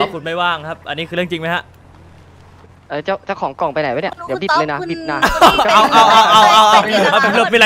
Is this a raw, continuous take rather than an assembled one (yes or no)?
yes